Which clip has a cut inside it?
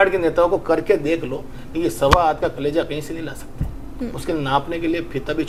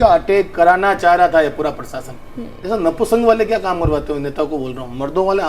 second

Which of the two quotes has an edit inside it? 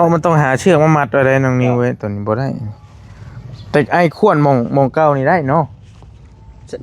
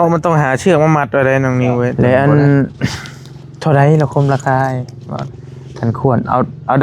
second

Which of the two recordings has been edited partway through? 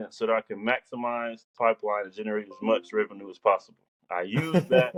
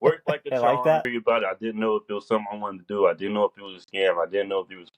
second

